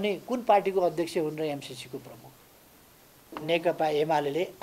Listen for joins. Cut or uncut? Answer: cut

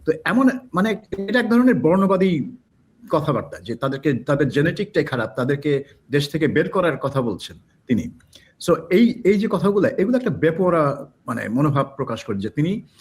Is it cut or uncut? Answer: uncut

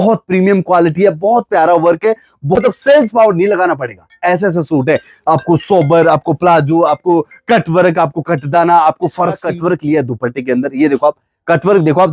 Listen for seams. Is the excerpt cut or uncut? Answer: cut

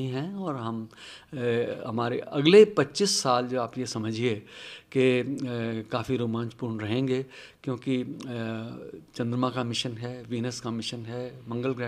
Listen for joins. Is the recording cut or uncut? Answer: uncut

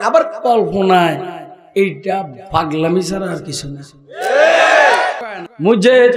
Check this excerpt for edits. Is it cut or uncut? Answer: cut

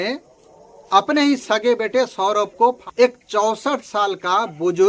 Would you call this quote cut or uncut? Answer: cut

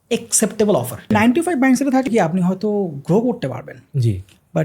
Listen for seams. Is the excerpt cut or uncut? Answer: cut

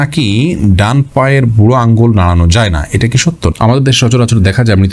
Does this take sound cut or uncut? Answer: cut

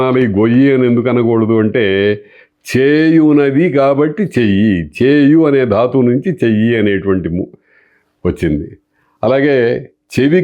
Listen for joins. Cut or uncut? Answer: uncut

